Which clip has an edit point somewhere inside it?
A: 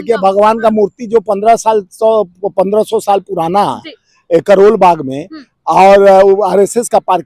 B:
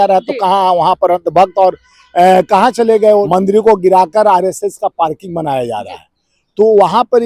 B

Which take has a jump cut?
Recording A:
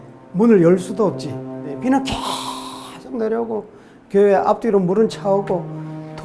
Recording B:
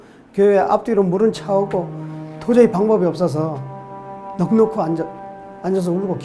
A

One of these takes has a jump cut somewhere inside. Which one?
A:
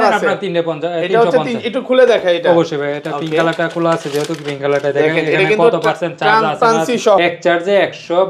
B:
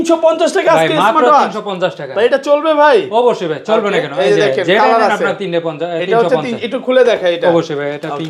A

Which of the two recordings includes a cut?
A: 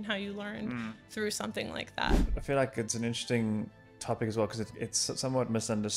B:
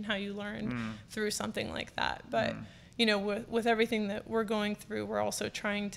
A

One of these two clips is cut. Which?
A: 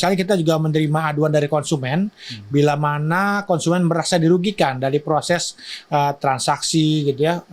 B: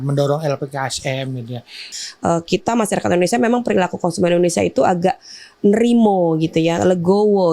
B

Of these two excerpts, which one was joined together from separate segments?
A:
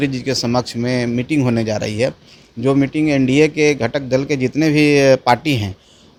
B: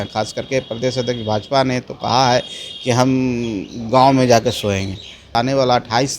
B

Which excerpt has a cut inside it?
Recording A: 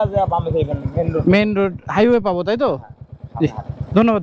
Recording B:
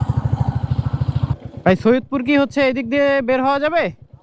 B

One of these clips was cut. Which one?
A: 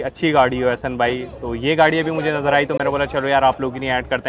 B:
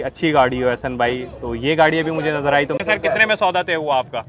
B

